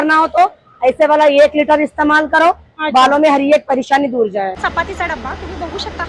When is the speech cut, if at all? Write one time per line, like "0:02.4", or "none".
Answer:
0:04.6